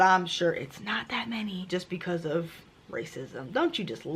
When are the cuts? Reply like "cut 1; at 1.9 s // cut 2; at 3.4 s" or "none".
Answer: cut 1; at 1.6 s